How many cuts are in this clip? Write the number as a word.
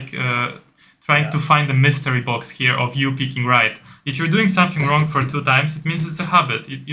zero